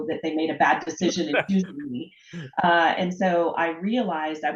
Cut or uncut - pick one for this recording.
uncut